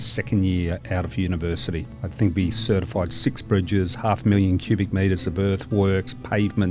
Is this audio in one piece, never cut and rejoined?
no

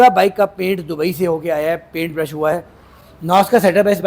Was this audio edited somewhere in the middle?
no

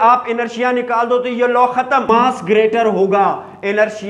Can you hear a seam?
yes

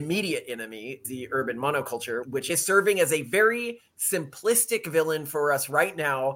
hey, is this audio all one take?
no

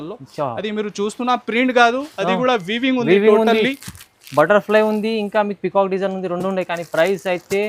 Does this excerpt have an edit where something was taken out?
no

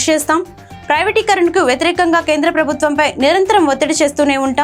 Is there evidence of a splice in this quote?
no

